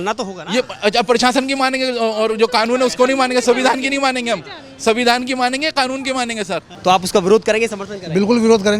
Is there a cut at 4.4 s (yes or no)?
no